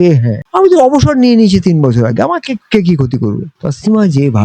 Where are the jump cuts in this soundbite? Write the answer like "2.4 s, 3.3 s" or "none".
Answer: 3.5 s